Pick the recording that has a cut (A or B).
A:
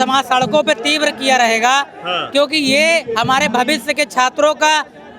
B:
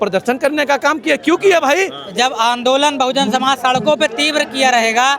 B